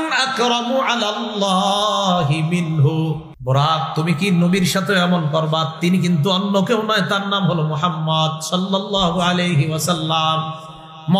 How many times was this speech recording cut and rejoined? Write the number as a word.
one